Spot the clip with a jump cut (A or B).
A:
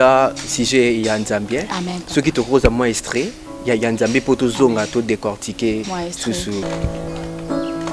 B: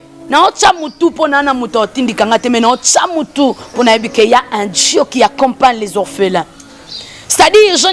A